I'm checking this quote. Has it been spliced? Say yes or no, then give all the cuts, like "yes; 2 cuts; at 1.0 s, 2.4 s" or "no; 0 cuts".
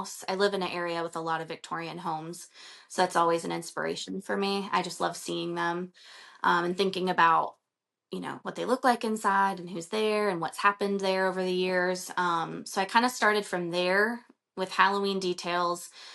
no; 0 cuts